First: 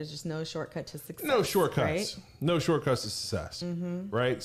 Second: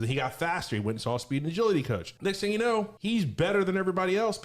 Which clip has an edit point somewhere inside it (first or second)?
second